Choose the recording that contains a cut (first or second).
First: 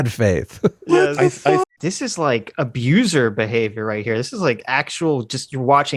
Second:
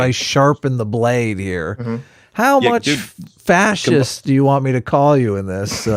first